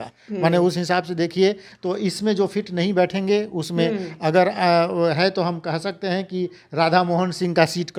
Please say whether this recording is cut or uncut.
uncut